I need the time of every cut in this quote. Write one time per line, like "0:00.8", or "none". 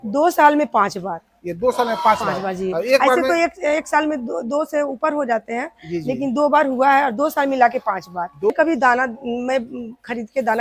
0:08.5